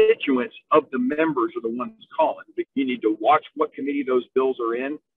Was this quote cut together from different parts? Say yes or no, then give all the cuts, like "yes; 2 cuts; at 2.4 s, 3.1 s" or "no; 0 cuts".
yes; 1 cut; at 2.6 s